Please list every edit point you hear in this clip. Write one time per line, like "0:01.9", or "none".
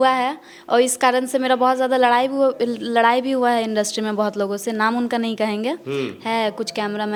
none